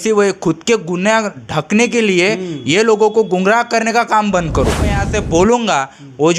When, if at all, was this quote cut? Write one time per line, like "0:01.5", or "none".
0:05.0